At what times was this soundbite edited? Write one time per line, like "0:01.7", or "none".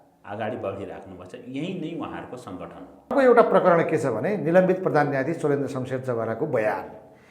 0:03.1